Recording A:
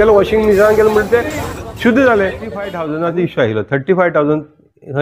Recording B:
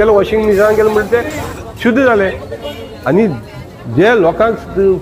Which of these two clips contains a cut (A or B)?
A